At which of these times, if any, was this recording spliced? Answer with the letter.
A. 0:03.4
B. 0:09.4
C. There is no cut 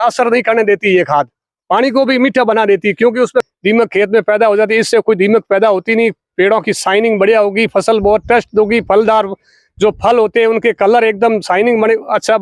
A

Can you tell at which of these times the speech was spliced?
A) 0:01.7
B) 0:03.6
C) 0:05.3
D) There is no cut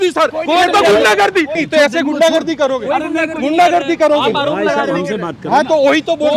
A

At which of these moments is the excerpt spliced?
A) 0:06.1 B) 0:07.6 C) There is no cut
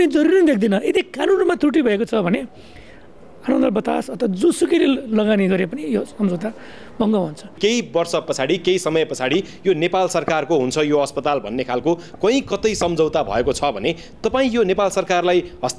B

